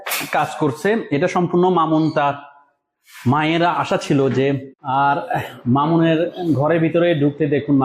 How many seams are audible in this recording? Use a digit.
1